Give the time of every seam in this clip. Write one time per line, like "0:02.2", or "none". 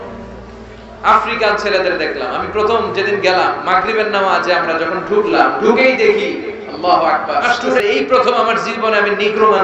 0:07.8